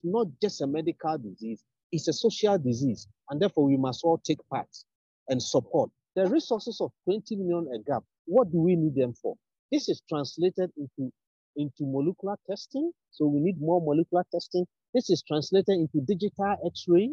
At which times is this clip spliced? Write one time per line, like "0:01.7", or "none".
0:06.0